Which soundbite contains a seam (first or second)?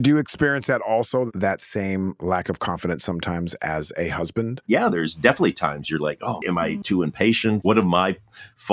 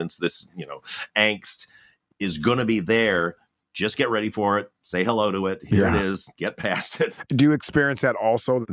first